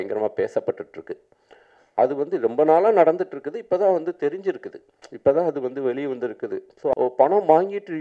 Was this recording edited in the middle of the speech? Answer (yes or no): yes